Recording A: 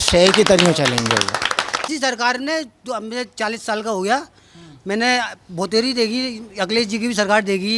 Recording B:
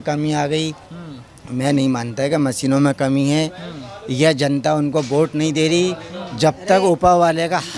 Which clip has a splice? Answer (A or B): A